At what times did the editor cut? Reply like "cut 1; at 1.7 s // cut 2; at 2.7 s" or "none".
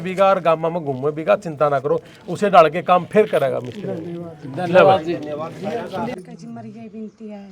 cut 1; at 6.1 s